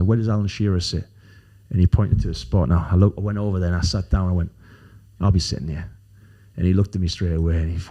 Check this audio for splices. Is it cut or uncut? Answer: uncut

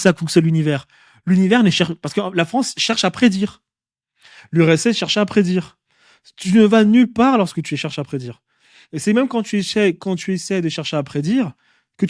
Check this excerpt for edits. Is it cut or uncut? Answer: uncut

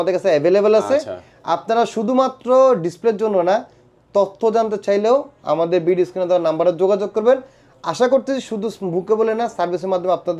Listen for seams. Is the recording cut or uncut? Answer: uncut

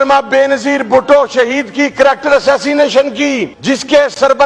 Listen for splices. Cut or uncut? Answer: cut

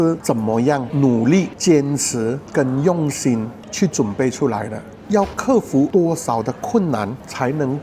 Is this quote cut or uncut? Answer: uncut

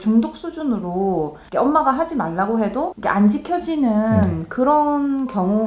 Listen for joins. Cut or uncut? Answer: uncut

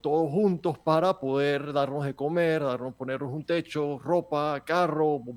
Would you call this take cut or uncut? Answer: uncut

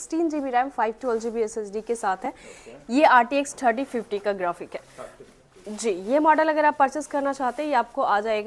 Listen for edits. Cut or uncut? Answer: uncut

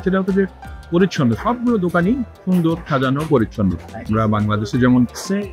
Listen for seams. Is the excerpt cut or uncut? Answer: cut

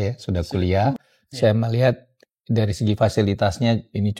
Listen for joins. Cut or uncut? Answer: cut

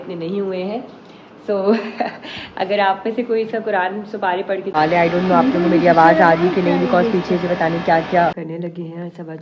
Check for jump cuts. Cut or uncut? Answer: cut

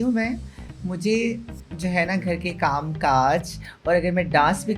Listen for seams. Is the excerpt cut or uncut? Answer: uncut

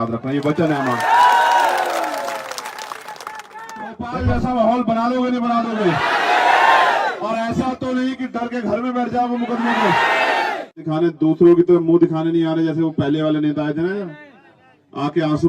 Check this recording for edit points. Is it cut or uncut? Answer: cut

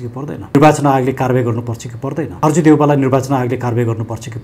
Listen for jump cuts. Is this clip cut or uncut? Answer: uncut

